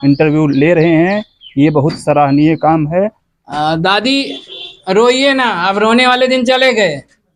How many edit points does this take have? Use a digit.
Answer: 1